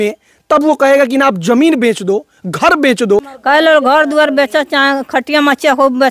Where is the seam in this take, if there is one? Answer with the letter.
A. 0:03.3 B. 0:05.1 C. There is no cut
A